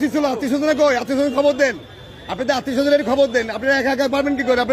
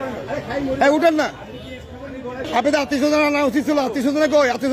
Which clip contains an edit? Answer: second; 1 cut; at 2.4 s

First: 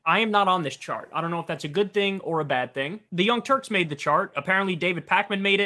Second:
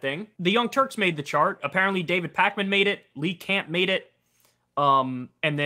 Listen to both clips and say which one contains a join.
first; 1 cut; at 1.5 s

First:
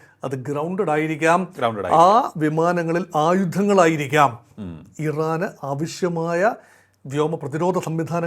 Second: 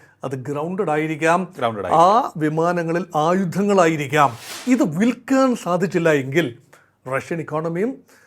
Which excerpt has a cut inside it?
second; 1 cut; at 4.5 s

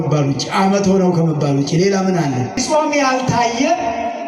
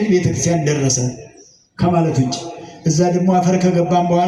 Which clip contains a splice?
first; 1 cut; at 2.6 s

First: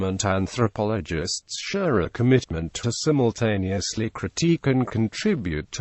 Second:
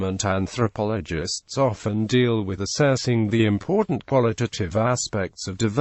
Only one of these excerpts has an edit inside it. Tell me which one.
first; 2 cuts; at 1.3 s, 4.5 s

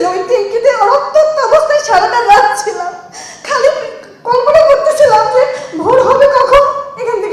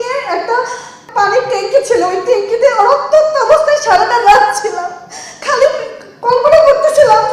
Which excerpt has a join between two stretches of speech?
second; 1 cut; at 1.0 s

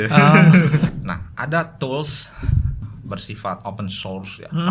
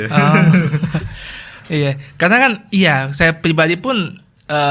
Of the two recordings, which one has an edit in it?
first; 2 cuts; at 0.9 s, 2.8 s

